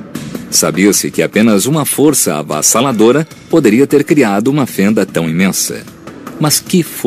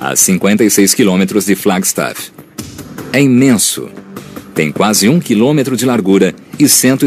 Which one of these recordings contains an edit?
second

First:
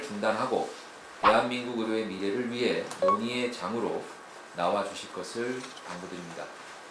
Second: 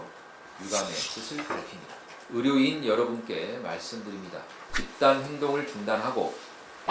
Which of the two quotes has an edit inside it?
second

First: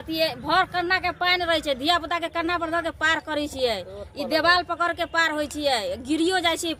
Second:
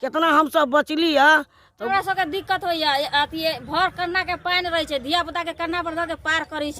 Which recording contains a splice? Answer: second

